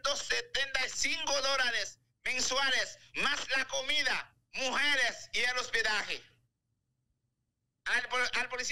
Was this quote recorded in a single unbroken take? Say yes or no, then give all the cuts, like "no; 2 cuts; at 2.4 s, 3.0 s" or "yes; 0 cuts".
yes; 0 cuts